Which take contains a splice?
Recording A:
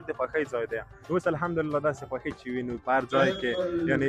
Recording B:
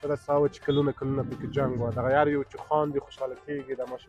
A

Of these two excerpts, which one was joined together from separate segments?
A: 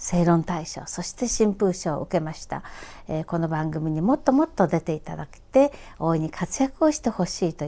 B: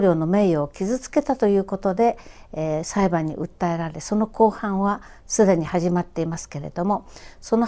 A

